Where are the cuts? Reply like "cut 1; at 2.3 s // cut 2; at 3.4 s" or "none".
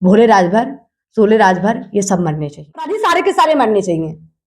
cut 1; at 2.9 s